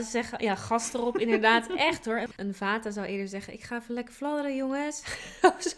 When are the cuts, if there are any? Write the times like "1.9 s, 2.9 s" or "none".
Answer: 2.3 s